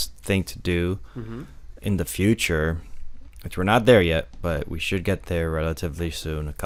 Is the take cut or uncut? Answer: uncut